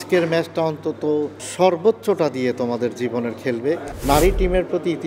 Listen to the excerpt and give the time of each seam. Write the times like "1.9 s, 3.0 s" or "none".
3.9 s